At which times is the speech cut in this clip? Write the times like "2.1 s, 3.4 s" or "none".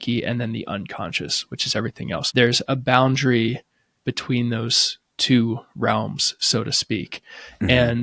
2.3 s